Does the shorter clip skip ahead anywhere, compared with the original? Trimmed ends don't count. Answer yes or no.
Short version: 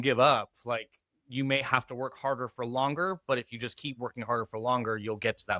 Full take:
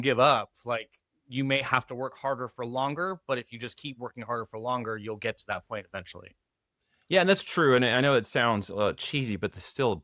no